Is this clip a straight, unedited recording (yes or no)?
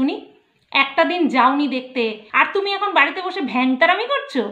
no